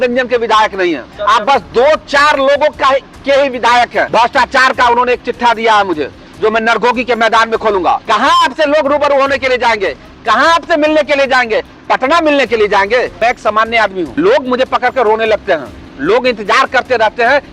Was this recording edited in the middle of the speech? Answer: yes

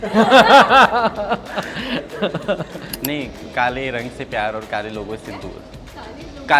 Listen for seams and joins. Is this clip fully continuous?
no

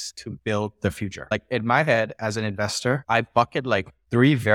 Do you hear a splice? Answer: no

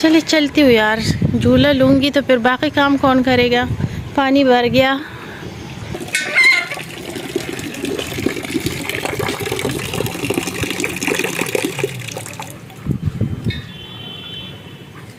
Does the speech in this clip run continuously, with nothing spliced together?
yes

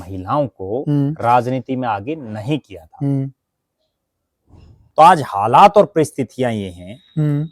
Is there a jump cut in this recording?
yes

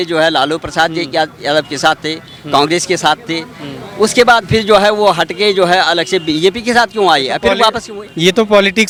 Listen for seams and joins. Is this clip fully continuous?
yes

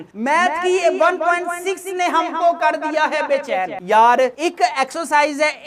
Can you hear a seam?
no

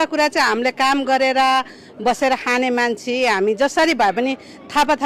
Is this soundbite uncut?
yes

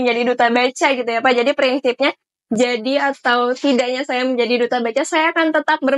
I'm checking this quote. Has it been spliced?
no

